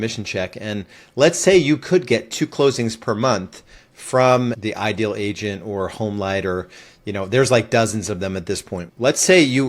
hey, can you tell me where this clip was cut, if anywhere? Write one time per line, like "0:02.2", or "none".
0:04.6
0:08.9